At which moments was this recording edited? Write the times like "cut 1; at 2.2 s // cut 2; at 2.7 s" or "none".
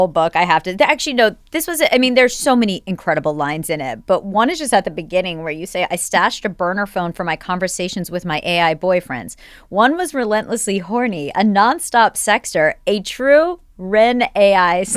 none

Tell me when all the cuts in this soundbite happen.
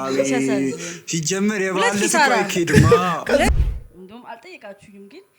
cut 1; at 3.5 s

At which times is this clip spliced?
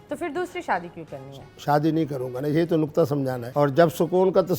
cut 1; at 3.4 s

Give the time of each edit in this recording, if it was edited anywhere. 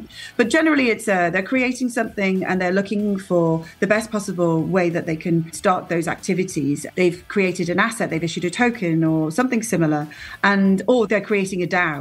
cut 1; at 5.5 s // cut 2; at 6.8 s // cut 3; at 11.1 s

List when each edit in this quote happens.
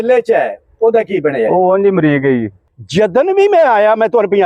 cut 1; at 2.5 s

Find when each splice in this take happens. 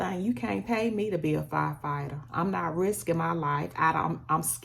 none

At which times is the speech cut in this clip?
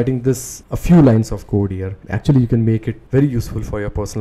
cut 1; at 2.0 s

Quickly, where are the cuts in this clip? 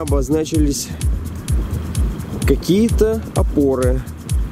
none

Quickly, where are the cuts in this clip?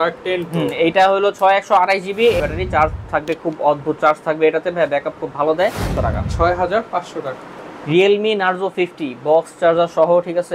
cut 1; at 2.4 s // cut 2; at 5.9 s

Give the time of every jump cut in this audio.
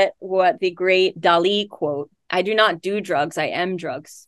cut 1; at 1.2 s // cut 2; at 2.2 s

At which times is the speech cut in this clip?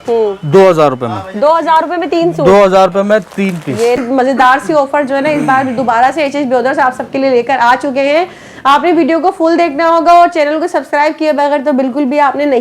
cut 1; at 4.0 s

